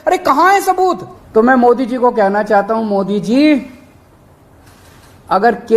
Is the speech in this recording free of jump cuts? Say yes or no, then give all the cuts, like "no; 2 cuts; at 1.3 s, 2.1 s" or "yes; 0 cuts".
no; 1 cut; at 1.1 s